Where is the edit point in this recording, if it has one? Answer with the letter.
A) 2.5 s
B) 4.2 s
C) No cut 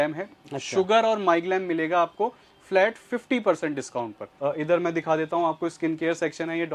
B